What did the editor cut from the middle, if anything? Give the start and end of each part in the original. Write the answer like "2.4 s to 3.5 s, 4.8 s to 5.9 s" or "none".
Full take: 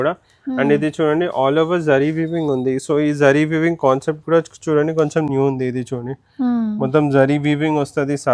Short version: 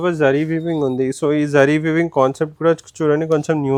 none